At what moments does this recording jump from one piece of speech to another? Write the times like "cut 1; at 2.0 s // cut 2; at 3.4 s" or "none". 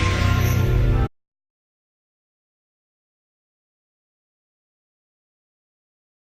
none